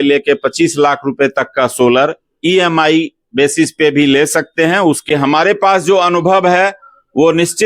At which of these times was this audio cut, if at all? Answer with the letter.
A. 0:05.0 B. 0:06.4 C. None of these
A